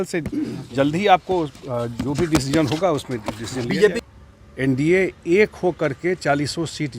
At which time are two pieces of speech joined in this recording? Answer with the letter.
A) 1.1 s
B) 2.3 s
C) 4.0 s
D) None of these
C